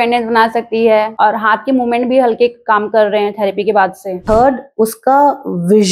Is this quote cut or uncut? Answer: cut